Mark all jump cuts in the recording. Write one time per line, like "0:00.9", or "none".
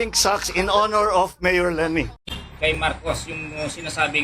0:02.1

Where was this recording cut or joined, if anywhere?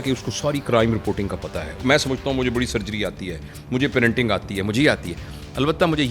0:01.8

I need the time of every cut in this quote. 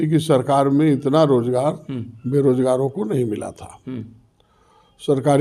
none

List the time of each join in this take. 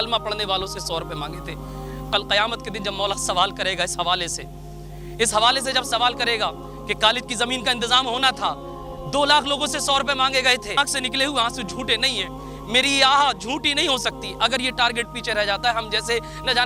0:01.9
0:10.8

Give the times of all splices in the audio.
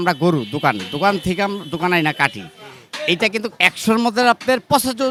none

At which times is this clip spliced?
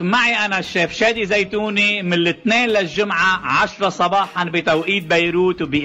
none

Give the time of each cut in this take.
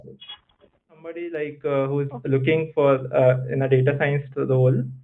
0:01.2

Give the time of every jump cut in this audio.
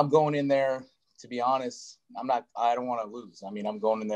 none

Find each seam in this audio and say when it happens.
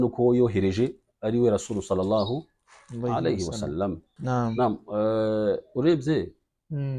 0:04.5

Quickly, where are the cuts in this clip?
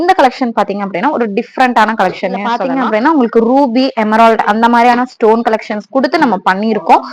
0:02.6

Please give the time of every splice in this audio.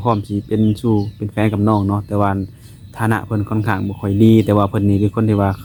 none

